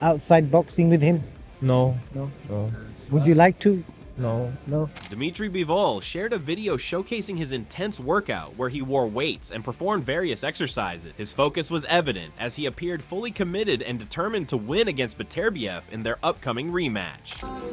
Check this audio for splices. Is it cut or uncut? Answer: uncut